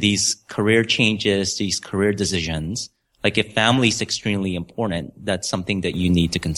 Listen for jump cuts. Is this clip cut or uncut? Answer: uncut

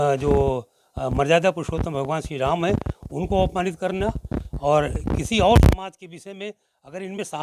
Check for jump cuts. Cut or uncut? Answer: uncut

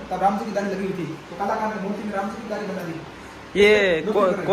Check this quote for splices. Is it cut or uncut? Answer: uncut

